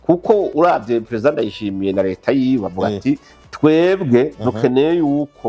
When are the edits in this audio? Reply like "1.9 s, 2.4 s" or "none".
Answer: none